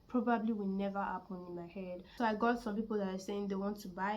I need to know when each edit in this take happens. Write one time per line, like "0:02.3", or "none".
0:02.0